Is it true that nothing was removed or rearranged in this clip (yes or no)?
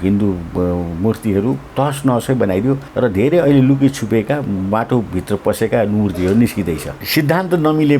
no